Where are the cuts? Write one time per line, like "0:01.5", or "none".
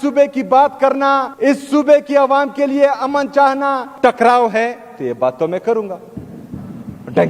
0:01.3
0:03.9